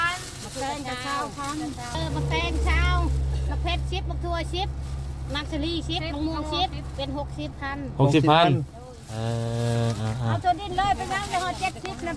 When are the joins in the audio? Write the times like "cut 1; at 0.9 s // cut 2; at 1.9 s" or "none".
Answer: cut 1; at 2.0 s